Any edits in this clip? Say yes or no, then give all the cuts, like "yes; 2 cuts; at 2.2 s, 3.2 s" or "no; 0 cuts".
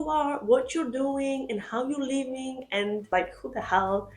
yes; 1 cut; at 3.1 s